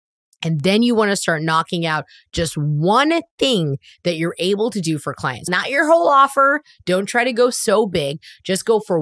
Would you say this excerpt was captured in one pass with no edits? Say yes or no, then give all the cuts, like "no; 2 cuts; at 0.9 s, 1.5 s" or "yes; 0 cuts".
yes; 0 cuts